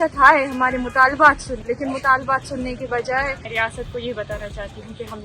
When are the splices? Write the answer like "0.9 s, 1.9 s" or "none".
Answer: 1.6 s, 3.4 s